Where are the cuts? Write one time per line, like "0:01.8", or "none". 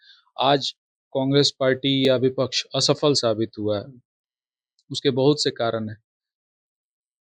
none